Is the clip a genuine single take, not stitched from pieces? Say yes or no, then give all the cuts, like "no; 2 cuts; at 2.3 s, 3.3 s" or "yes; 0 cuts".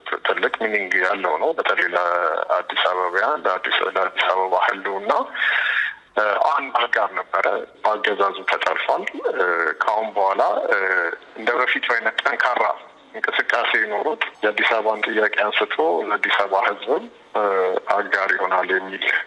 no; 1 cut; at 7.7 s